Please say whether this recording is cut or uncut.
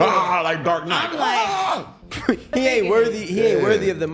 cut